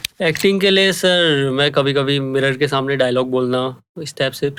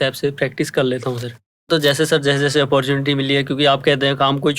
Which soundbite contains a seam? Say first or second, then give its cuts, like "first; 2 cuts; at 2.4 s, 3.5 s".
second; 1 cut; at 1.7 s